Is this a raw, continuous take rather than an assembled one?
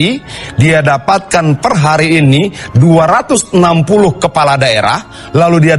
yes; 0 cuts

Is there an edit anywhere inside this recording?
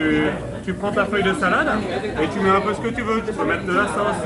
no; 0 cuts

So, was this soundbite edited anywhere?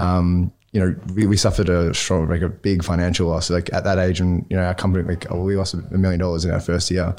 no; 0 cuts

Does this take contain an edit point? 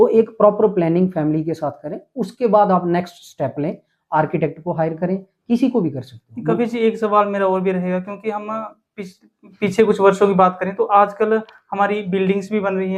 no; 0 cuts

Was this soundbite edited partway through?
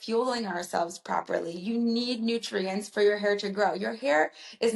no; 0 cuts

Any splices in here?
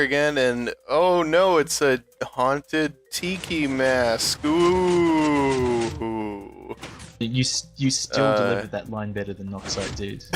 no; 0 cuts

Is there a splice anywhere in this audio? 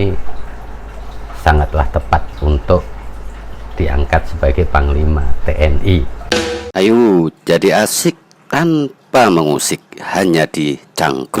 yes; 1 cut; at 6.1 s

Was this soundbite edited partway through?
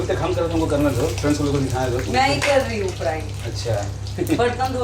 no; 0 cuts

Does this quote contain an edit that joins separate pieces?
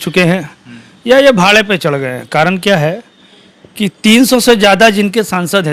no; 0 cuts

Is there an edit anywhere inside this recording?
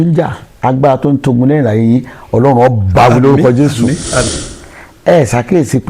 yes; 1 cut; at 4.3 s

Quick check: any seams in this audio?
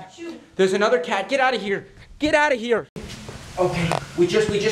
yes; 1 cut; at 3.1 s

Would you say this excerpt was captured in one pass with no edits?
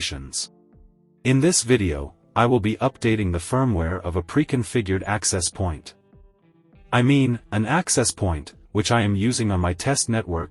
yes; 0 cuts

